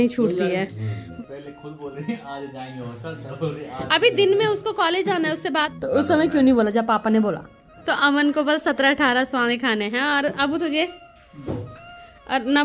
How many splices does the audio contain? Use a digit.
3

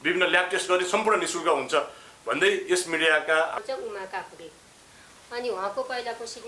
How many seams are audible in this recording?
1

